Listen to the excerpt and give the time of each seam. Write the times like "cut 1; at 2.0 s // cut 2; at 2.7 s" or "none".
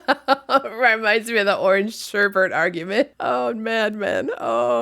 cut 1; at 3.2 s